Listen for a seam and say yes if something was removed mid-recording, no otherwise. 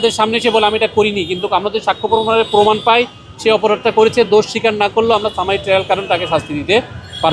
no